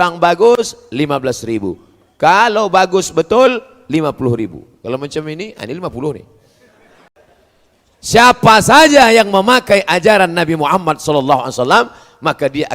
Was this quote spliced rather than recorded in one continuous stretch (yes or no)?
yes